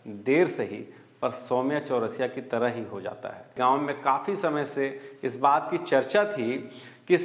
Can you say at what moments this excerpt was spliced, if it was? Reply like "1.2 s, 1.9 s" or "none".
3.5 s